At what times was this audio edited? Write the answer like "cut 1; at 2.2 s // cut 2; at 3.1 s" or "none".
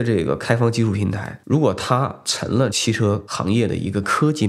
cut 1; at 2.7 s